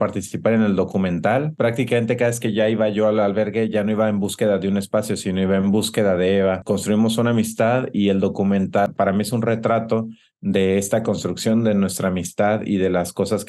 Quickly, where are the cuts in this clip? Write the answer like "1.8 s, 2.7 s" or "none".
none